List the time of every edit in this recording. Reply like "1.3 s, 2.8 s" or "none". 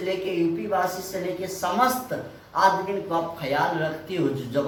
none

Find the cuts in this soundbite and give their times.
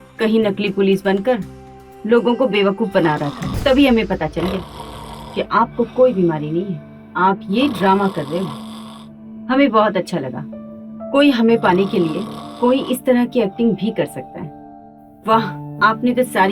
3.5 s

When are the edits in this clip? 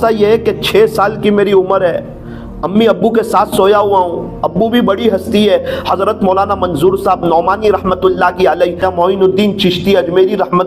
8.8 s

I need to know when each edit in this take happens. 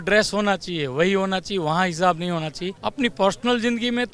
2.7 s

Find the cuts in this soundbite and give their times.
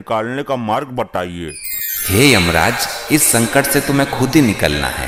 none

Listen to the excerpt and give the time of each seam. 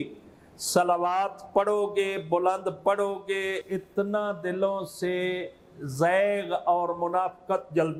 none

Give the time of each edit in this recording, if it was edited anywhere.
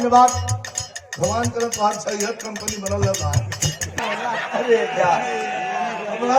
4.0 s

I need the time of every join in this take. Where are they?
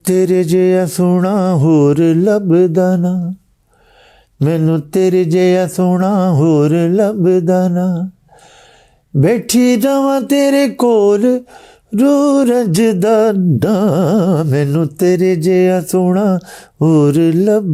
none

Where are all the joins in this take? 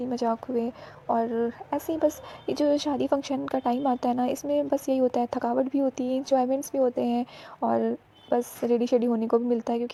none

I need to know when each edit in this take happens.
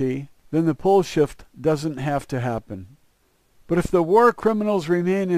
none

